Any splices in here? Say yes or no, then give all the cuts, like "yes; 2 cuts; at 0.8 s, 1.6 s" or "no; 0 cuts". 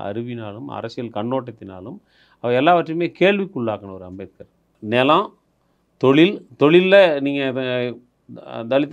yes; 1 cut; at 4.7 s